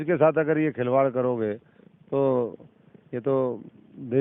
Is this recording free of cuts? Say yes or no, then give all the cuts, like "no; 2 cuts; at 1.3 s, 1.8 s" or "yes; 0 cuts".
yes; 0 cuts